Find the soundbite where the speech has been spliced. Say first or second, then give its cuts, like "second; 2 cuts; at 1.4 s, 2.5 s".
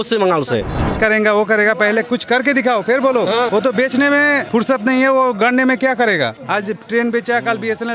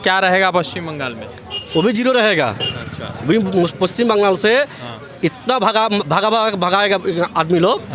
first; 4 cuts; at 1.0 s, 3.5 s, 4.4 s, 6.4 s